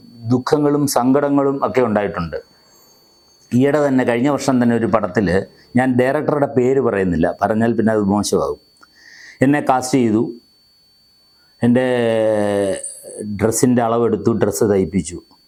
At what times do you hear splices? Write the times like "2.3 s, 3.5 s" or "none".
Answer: none